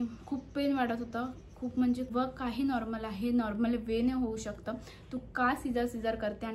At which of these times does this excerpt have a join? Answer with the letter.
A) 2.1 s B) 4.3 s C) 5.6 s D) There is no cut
A